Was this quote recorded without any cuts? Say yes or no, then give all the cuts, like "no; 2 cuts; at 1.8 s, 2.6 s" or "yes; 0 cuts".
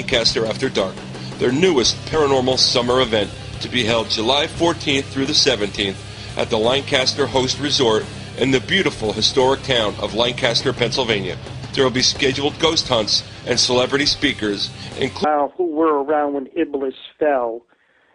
yes; 0 cuts